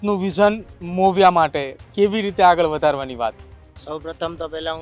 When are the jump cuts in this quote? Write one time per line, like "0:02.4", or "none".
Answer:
none